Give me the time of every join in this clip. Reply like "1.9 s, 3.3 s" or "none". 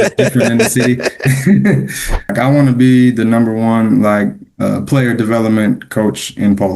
2.3 s